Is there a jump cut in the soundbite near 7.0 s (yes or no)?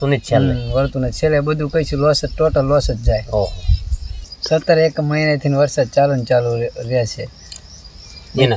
no